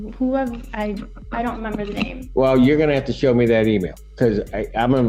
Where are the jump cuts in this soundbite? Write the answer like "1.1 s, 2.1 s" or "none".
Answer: none